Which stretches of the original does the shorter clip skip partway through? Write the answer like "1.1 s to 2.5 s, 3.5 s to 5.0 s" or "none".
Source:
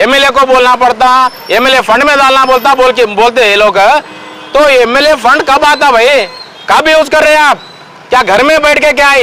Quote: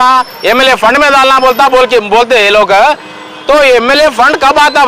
none